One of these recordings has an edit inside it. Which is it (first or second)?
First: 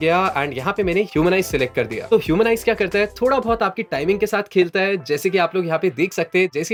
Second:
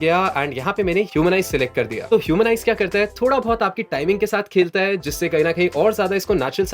second